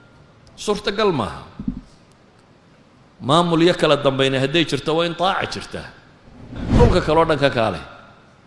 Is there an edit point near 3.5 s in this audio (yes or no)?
no